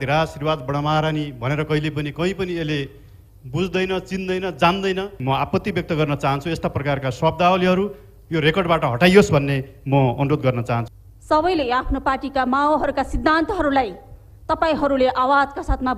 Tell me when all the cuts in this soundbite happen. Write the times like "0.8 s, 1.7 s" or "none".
5.1 s, 10.9 s